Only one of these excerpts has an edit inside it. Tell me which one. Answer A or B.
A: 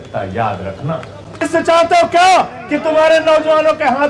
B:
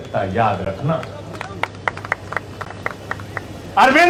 A